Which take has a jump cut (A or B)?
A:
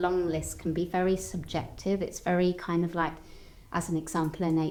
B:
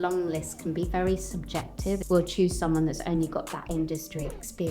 B